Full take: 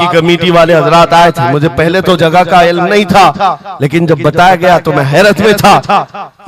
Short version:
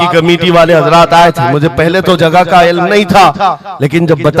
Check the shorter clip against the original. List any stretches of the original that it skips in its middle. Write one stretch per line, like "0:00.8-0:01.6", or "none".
none